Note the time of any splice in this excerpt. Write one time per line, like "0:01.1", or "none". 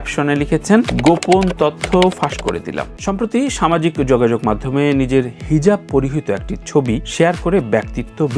0:02.9